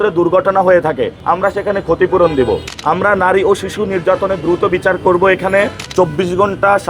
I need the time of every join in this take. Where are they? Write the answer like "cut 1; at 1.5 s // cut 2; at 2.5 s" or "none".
cut 1; at 1.2 s // cut 2; at 2.7 s // cut 3; at 5.8 s